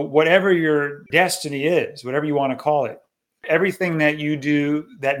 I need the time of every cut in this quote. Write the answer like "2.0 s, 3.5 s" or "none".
1.0 s, 3.4 s